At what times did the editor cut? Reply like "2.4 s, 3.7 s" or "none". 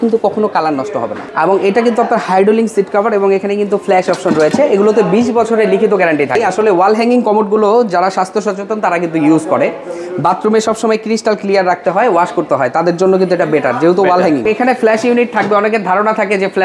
1.2 s, 6.5 s, 14.5 s